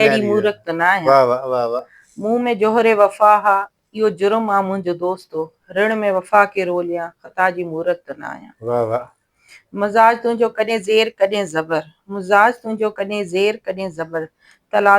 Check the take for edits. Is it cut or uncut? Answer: uncut